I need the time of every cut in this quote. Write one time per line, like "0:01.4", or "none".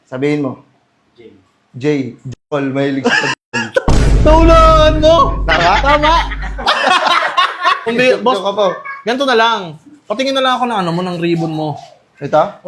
0:07.9